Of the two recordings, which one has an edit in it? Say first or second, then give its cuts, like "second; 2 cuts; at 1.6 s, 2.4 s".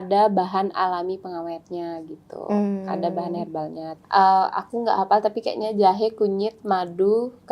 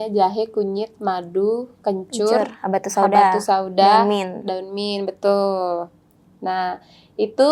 first; 1 cut; at 3.8 s